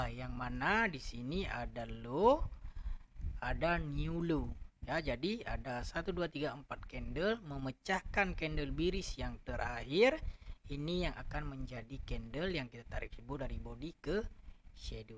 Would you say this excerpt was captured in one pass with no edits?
yes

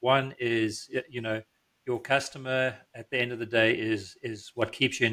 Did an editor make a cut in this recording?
no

